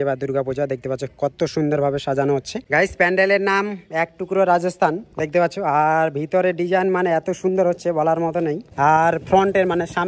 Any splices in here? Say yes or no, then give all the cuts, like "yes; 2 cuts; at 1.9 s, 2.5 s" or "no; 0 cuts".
yes; 2 cuts; at 2.6 s, 8.6 s